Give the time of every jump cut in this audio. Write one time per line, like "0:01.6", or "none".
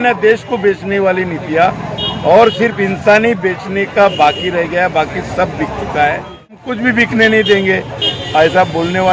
0:06.6